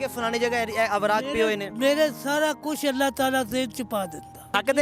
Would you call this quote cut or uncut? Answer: uncut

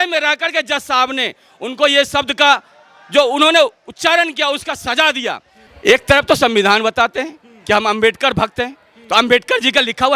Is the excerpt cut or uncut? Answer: cut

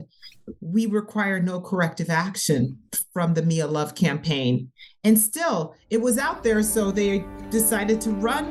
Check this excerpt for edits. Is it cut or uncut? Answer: uncut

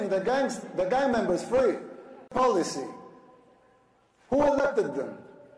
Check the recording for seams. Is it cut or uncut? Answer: uncut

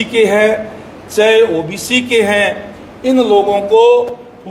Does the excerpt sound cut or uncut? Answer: uncut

